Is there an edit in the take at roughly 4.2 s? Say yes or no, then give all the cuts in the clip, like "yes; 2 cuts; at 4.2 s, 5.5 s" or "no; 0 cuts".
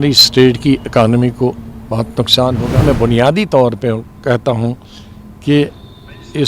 no; 1 cut; at 2.8 s